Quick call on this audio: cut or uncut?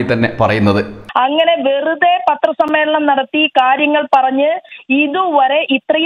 cut